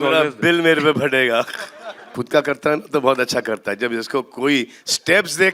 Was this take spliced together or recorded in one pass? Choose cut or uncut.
cut